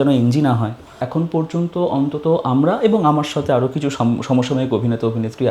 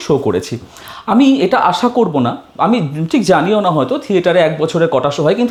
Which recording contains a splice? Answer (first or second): first